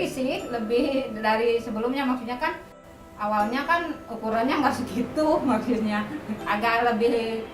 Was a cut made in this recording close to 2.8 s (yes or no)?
yes